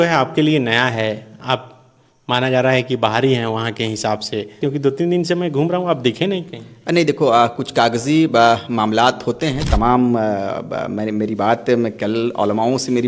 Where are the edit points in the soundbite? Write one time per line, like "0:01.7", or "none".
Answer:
0:04.5
0:09.6